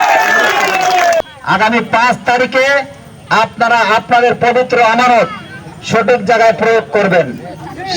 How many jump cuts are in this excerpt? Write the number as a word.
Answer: one